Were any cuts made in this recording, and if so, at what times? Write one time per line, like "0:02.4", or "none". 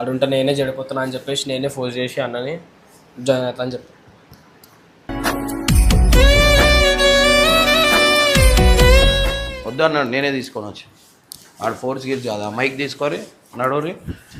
none